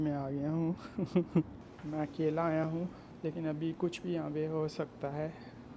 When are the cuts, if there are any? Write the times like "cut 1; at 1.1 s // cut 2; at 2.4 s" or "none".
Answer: cut 1; at 1.6 s // cut 2; at 3.0 s

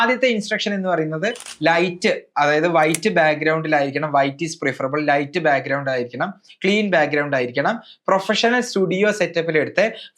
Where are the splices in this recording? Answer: none

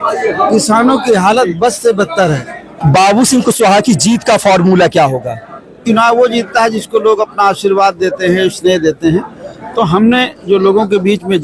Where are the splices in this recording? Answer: cut 1; at 2.7 s // cut 2; at 5.8 s

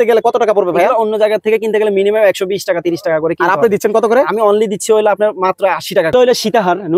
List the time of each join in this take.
cut 1; at 6.1 s

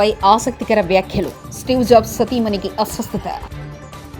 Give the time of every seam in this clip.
none

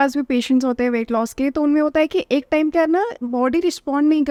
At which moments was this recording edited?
none

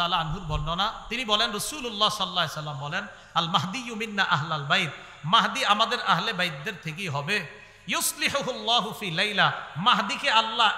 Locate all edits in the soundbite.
none

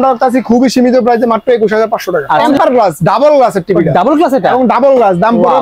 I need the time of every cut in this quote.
cut 1; at 2.3 s

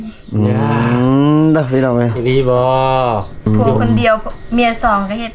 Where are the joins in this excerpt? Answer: cut 1; at 3.5 s

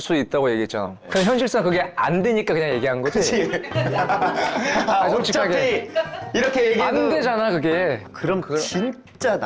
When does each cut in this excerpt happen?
cut 1; at 8.1 s

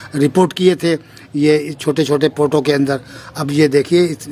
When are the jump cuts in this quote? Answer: none

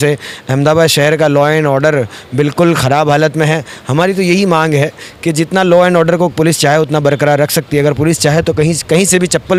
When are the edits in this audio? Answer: none

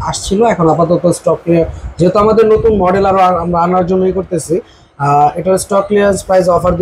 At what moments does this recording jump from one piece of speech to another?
none

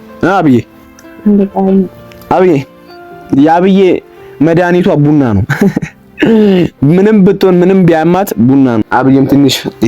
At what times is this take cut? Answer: cut 1; at 8.9 s

